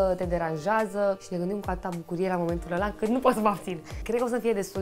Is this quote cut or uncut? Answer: cut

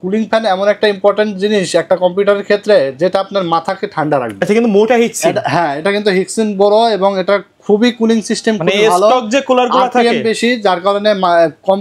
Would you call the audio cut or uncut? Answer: uncut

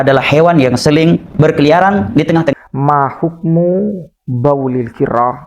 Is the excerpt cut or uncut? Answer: cut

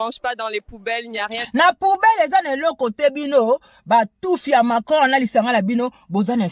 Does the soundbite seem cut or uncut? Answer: cut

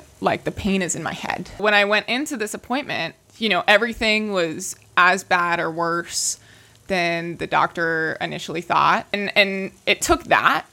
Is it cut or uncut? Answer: cut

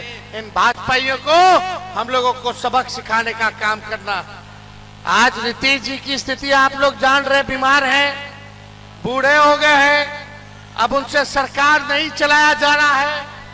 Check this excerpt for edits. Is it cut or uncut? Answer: uncut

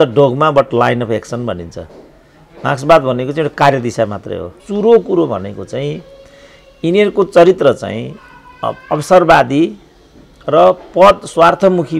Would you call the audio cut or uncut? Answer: cut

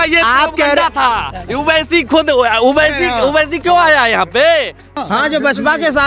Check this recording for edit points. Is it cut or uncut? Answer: cut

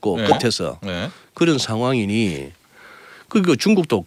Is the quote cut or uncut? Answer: uncut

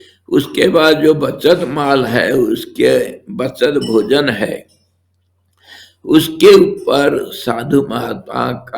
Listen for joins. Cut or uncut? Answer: uncut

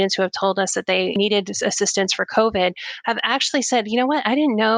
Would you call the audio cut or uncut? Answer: cut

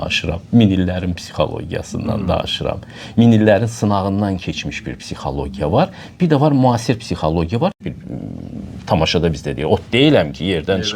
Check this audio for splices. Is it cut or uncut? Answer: cut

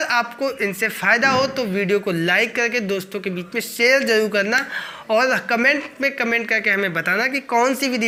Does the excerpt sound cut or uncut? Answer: uncut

